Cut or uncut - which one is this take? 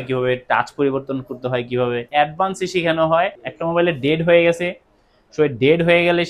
cut